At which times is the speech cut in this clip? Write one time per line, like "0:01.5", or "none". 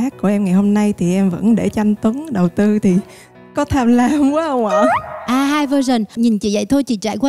0:06.2